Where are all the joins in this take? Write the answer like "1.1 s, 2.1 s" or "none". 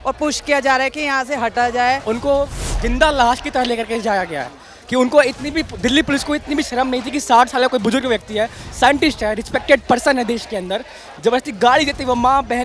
2.0 s